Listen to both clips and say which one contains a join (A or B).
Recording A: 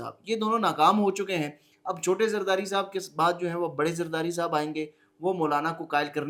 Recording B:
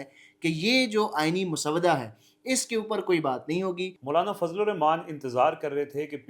B